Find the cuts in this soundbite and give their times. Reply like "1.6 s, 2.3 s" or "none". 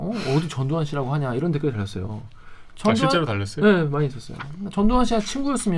none